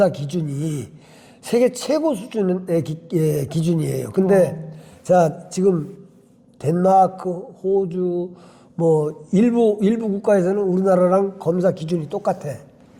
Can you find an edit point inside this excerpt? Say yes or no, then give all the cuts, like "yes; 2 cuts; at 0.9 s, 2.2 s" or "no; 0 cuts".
no; 0 cuts